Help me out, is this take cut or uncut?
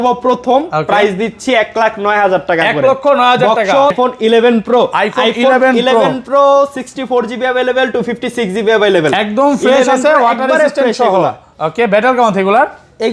cut